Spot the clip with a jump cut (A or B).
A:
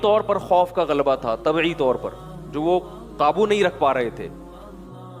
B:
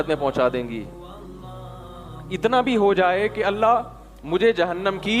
A